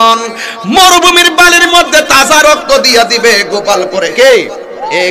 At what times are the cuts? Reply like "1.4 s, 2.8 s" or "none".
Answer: none